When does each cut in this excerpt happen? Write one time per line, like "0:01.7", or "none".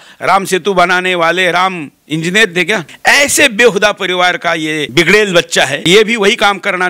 0:02.9
0:04.9
0:05.8